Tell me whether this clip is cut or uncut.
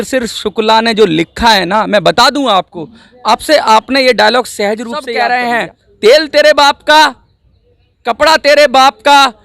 cut